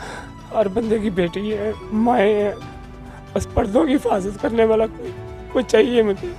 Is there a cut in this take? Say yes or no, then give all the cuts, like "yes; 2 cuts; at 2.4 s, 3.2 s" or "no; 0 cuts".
no; 0 cuts